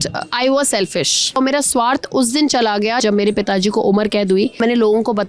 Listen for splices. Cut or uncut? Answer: cut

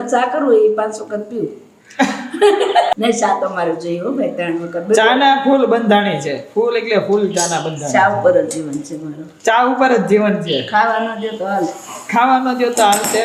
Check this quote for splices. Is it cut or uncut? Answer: uncut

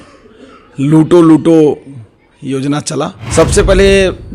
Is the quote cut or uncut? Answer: cut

